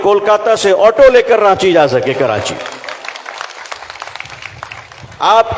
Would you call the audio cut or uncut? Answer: uncut